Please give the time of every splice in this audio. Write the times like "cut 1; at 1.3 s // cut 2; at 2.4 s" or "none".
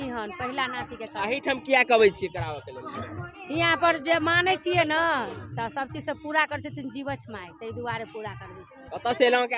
none